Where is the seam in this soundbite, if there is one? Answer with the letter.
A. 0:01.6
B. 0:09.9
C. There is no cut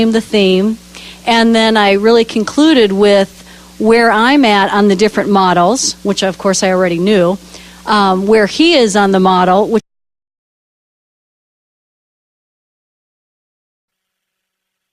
C